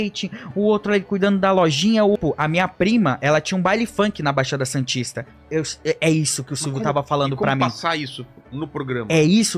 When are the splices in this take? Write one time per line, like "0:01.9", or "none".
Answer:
0:02.2
0:05.3